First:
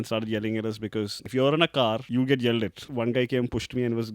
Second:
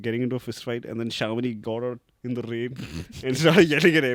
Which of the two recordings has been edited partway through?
first; 3 cuts; at 1.2 s, 2.0 s, 2.8 s

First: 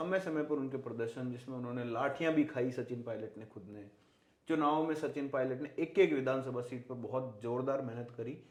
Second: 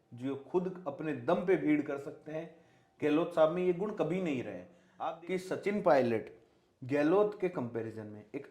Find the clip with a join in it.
second; 1 cut; at 4.8 s

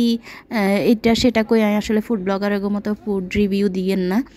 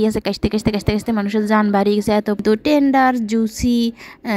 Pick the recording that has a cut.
second; 1 cut; at 2.4 s

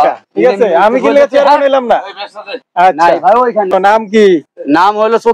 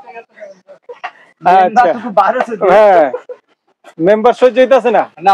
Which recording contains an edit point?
first; 1 cut; at 3.7 s

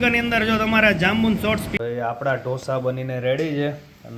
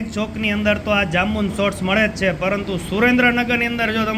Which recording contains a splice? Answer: first; 1 cut; at 1.7 s

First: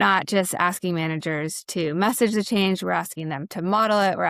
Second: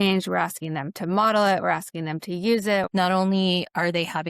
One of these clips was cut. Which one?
second; 1 cut; at 2.9 s

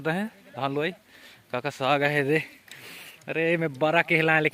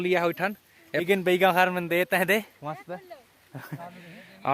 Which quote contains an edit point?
second; 2 cuts; at 1.0 s, 3.5 s

